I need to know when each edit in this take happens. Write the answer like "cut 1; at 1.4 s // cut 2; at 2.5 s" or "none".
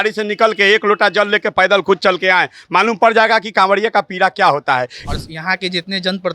cut 1; at 5.0 s